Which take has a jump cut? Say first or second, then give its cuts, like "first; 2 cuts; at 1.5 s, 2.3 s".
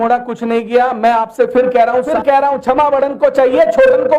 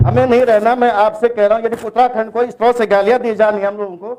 first; 1 cut; at 2.1 s